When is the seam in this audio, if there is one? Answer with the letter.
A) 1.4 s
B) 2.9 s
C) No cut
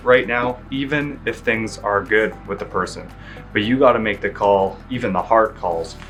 C